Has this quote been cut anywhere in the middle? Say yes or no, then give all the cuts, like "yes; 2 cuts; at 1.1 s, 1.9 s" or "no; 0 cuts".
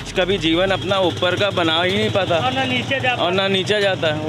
no; 0 cuts